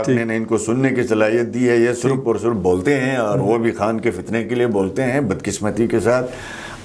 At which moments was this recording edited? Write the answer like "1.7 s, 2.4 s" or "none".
none